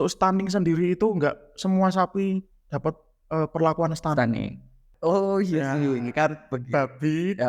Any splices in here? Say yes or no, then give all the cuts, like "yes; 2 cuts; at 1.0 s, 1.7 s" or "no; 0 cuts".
yes; 1 cut; at 4.9 s